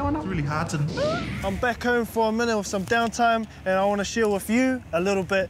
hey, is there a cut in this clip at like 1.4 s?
yes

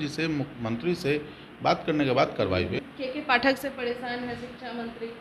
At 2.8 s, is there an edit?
yes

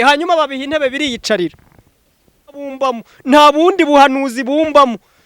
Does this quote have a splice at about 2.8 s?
yes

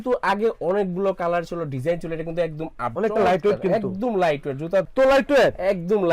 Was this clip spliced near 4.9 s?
yes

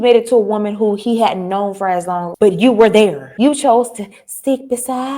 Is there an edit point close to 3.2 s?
yes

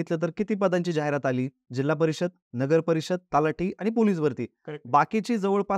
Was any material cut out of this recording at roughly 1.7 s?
no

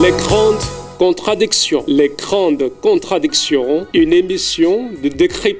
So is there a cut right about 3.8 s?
yes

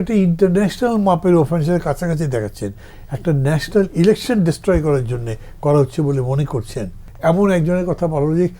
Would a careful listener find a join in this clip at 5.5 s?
no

